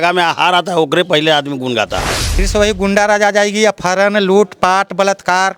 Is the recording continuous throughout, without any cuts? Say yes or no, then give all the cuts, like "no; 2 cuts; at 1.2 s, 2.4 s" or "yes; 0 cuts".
no; 1 cut; at 2.2 s